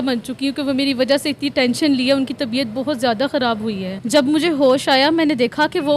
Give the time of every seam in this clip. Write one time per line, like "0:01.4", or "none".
0:03.9